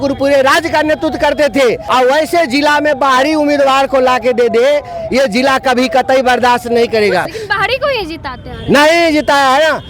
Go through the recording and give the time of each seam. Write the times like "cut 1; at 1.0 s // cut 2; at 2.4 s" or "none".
cut 1; at 1.8 s // cut 2; at 7.3 s